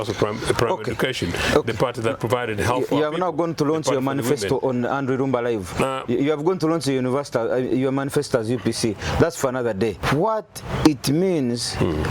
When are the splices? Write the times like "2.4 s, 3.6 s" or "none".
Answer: 10.0 s

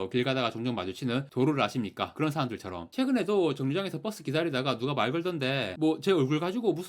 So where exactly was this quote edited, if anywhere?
2.9 s

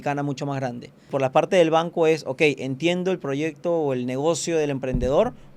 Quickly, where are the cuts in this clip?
1.1 s

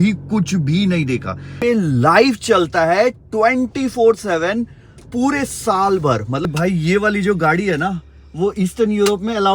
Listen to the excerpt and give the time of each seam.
1.5 s, 6.5 s

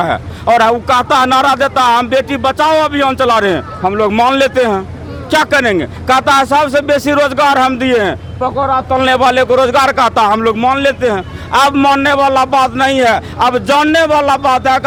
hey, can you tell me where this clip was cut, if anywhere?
none

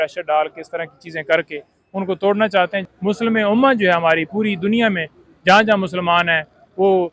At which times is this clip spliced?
2.8 s

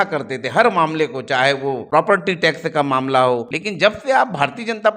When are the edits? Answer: 1.8 s, 3.5 s

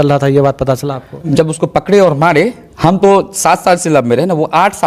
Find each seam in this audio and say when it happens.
1.3 s, 2.6 s

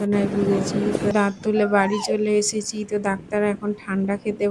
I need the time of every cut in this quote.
1.1 s

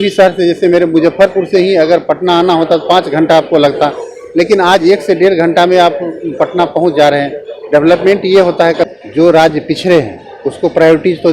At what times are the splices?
8.9 s

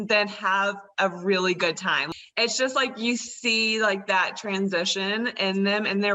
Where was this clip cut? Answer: 2.0 s

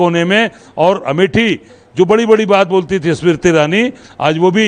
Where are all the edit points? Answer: 1.8 s

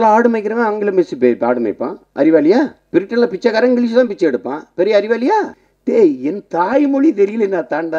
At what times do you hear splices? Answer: 2.8 s, 5.6 s

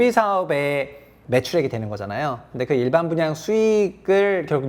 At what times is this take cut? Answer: 1.2 s

